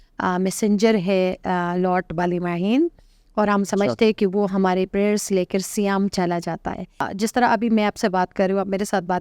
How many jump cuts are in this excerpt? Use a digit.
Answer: 1